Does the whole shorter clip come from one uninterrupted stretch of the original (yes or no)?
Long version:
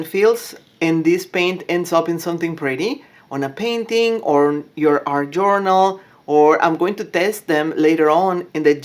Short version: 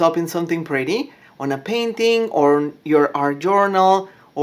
yes